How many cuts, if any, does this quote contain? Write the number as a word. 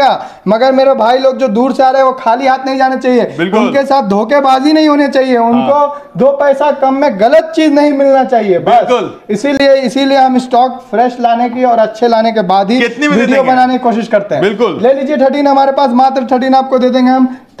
zero